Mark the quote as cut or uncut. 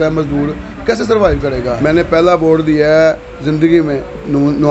cut